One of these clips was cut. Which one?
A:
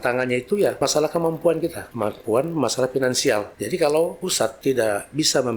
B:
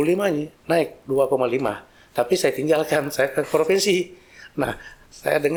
A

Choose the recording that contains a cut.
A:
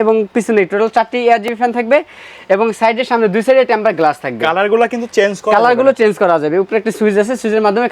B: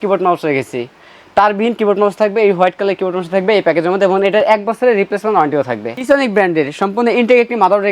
B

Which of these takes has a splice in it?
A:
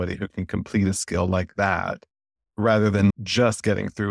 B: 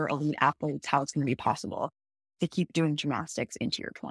A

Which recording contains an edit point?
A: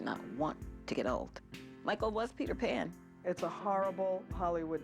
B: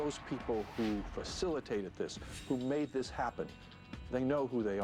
A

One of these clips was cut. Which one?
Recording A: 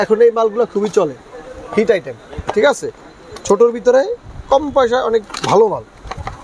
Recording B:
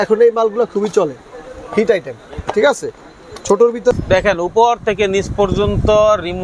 B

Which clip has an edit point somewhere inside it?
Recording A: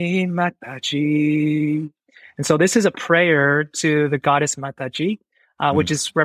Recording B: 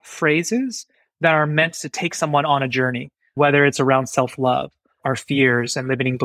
B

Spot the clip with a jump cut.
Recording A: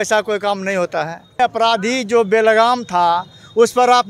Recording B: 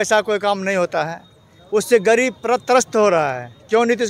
A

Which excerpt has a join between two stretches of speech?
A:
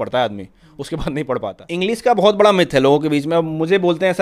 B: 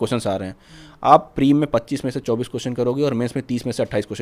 A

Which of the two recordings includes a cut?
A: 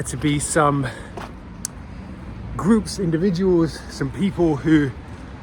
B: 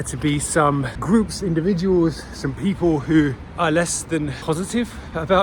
B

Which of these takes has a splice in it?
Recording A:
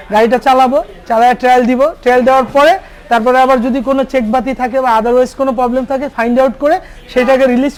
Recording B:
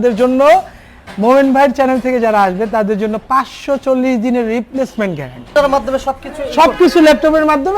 B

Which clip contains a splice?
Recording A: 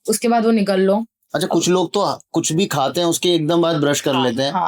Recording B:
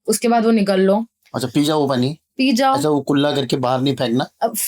A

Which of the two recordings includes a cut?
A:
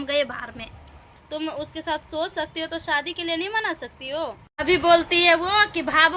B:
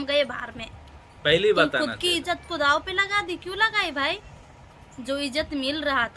A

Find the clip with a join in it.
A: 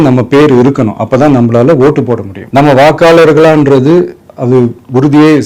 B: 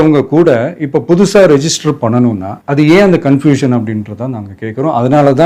A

